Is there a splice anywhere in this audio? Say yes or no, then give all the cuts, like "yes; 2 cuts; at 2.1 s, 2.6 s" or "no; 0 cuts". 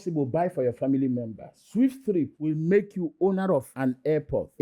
no; 0 cuts